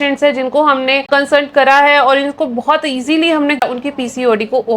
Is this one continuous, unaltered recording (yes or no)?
no